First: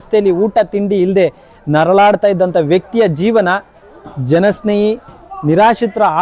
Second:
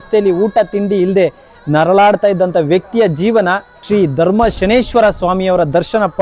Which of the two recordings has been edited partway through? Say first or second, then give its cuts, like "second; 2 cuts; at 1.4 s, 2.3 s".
second; 1 cut; at 3.7 s